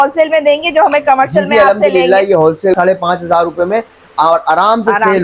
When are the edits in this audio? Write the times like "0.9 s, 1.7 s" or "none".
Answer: 2.8 s